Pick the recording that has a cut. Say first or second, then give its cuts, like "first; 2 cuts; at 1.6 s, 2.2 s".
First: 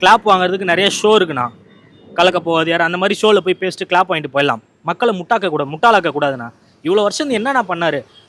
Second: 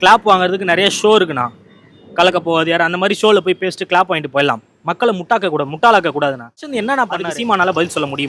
second; 1 cut; at 6.8 s